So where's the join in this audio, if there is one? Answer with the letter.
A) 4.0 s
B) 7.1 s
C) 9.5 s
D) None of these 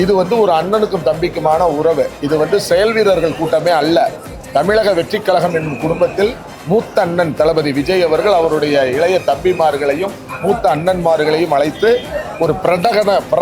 D